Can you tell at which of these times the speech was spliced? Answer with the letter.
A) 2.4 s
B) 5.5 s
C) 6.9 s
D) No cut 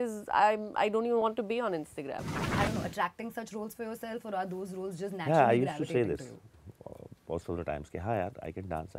A